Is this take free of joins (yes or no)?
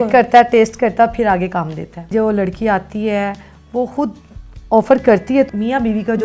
no